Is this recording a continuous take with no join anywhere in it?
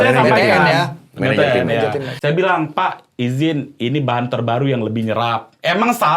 no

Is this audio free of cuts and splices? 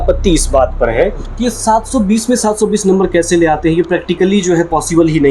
yes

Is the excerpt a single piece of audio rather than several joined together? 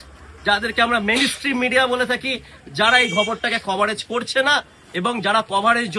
yes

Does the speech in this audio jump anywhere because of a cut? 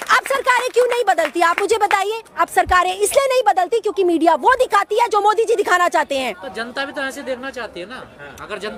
no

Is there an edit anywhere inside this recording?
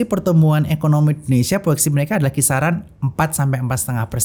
no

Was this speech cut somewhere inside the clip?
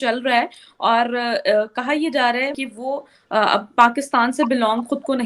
yes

